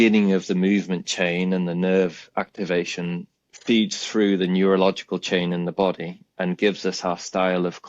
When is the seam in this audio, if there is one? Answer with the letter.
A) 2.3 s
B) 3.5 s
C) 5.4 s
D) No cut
D